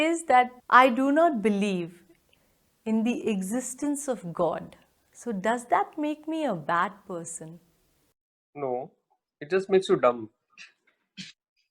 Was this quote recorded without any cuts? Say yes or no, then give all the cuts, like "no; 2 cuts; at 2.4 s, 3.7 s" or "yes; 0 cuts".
yes; 0 cuts